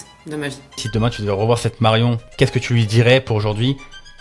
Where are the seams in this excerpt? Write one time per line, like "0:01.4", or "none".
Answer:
0:00.8
0:02.2